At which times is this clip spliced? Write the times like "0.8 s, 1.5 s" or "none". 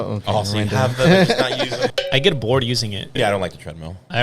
1.9 s, 3.1 s